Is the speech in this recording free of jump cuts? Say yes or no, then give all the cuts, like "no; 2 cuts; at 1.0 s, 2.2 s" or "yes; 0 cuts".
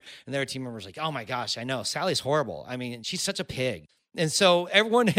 no; 1 cut; at 3.9 s